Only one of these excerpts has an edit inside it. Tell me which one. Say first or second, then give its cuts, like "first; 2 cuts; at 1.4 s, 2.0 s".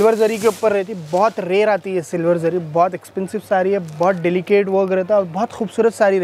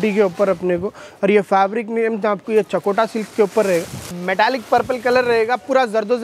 second; 1 cut; at 4.1 s